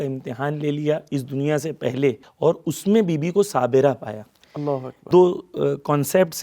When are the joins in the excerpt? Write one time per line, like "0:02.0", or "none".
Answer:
0:02.3
0:05.0